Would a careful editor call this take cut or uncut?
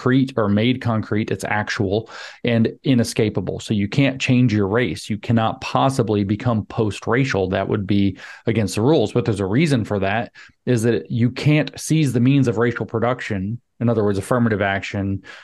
uncut